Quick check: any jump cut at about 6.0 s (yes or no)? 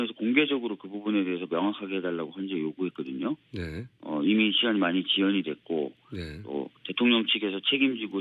no